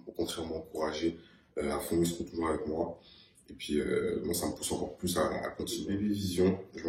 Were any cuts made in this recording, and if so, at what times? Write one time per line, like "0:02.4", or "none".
0:05.9